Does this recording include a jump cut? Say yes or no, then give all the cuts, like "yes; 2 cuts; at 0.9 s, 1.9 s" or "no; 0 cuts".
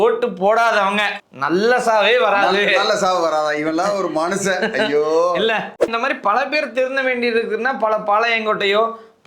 yes; 1 cut; at 5.8 s